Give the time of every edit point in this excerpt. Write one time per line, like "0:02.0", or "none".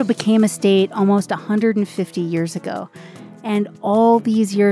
none